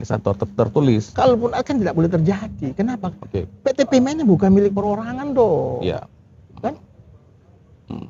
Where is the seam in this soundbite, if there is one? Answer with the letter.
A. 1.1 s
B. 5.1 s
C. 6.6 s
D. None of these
A